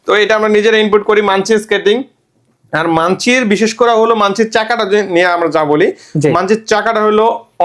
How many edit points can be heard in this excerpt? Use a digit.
0